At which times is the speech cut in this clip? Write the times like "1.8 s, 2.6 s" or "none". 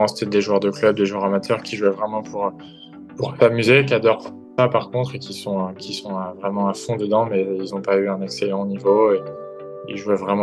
none